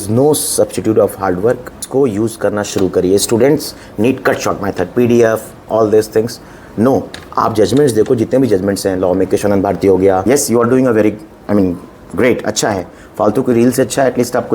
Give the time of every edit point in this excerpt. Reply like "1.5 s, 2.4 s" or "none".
1.8 s, 10.2 s